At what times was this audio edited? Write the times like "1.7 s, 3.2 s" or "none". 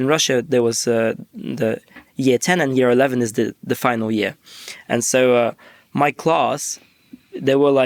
none